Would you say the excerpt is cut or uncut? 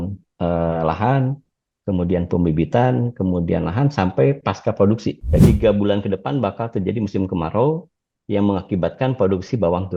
cut